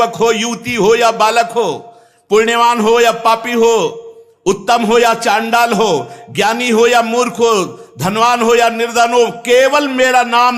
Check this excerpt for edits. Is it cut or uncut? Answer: uncut